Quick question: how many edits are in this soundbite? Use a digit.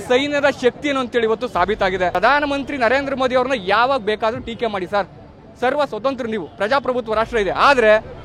1